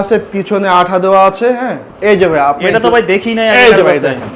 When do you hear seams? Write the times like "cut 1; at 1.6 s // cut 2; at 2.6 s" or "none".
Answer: cut 1; at 1.8 s